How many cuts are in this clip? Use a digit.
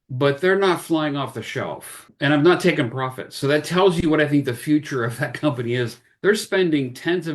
1